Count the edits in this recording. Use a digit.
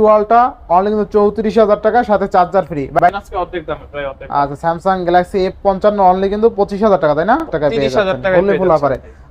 2